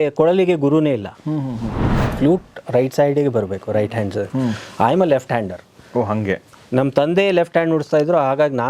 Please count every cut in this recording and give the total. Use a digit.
1